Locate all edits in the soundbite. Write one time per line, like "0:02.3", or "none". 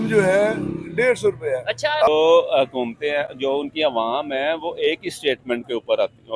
0:02.1